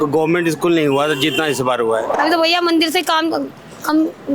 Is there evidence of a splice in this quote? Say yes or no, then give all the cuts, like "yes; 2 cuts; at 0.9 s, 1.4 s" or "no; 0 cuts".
yes; 1 cut; at 2.2 s